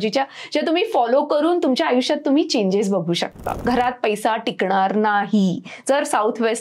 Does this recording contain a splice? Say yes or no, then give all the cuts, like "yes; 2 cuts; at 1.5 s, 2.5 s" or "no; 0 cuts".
yes; 1 cut; at 3.5 s